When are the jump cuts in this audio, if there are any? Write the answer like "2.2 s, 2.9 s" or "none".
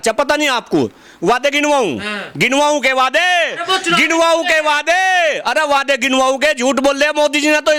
none